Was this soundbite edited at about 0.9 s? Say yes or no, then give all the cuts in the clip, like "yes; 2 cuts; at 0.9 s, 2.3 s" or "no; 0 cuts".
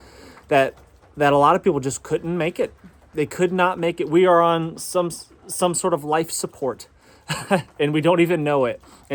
no; 0 cuts